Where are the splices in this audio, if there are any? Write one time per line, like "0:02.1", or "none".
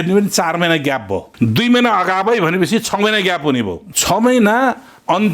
0:01.3
0:03.9